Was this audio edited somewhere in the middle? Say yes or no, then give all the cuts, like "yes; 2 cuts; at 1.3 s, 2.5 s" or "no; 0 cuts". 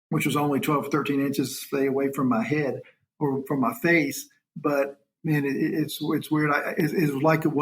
yes; 1 cut; at 5.1 s